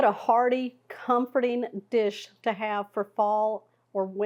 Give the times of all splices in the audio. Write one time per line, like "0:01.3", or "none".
none